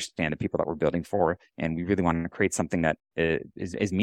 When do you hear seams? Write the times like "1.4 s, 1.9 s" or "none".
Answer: none

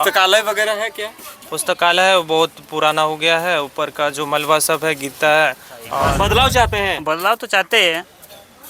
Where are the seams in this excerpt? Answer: 6.0 s

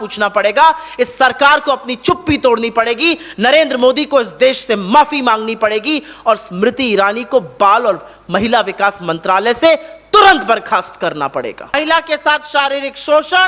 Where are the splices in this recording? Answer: 11.7 s

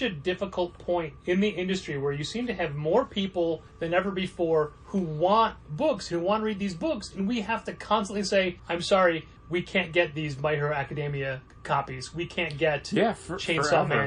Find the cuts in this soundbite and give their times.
1.1 s, 3.7 s, 4.8 s, 8.6 s, 9.3 s, 11.5 s

